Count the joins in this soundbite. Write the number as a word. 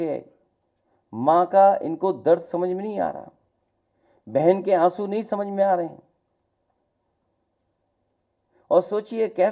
zero